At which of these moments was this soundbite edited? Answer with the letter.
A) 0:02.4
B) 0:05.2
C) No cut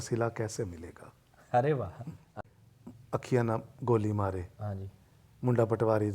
A